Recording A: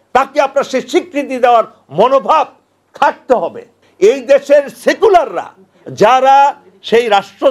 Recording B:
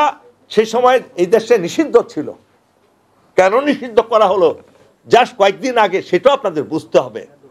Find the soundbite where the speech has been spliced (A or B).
A